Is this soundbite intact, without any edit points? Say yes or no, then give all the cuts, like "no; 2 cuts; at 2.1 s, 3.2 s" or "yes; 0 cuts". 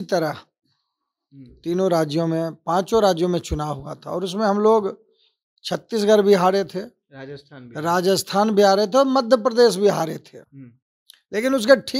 yes; 0 cuts